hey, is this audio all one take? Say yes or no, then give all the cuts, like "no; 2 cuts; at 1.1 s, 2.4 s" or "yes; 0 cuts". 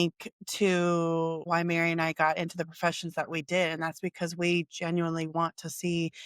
no; 1 cut; at 1.5 s